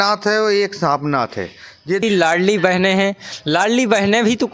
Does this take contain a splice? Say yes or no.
yes